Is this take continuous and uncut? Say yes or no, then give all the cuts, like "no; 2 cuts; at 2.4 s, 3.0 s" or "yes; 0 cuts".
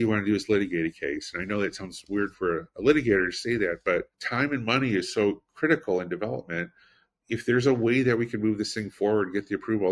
no; 1 cut; at 4.2 s